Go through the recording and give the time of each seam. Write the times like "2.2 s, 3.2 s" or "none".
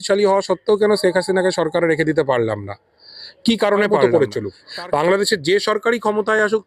3.9 s